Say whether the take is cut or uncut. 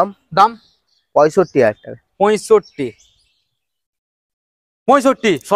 uncut